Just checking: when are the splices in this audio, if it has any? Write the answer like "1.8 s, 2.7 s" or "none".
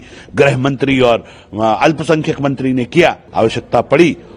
3.2 s